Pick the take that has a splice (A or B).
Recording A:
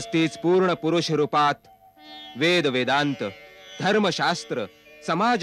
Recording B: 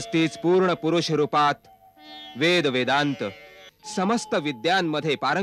B